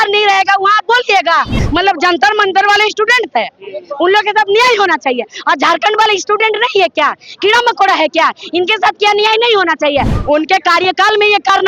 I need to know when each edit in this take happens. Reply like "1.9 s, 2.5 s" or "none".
1.6 s, 10.1 s